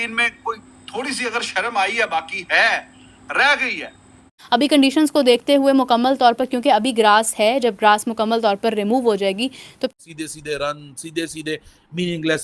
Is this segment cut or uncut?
cut